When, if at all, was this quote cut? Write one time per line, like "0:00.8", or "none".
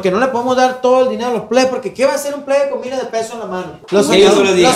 0:03.7